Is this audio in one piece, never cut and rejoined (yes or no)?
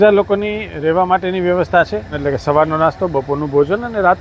no